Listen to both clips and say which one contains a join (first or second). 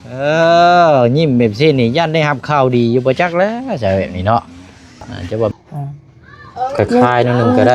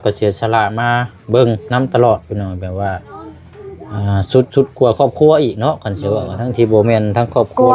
first